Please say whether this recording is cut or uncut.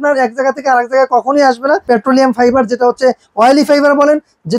cut